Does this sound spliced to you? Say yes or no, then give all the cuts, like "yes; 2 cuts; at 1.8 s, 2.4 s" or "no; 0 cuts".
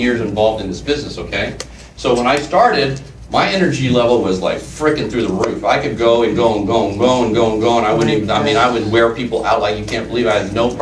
no; 0 cuts